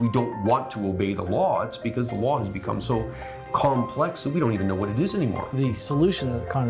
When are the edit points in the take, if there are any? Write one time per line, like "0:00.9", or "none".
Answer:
0:05.6